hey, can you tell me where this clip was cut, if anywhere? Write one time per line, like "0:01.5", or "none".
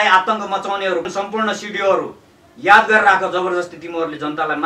0:01.1